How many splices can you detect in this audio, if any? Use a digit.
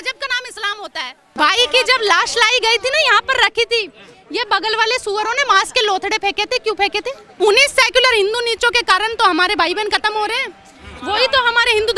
2